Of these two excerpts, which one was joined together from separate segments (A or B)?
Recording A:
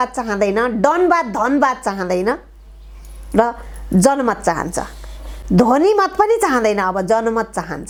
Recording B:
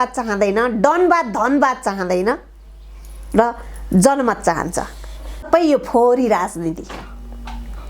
B